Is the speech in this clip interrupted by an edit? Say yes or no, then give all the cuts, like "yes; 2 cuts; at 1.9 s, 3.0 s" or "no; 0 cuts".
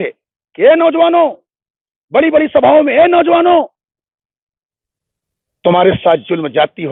no; 0 cuts